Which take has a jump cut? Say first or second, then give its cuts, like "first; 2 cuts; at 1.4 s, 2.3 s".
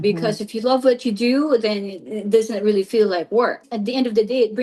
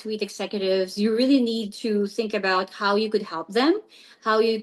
first; 1 cut; at 3.7 s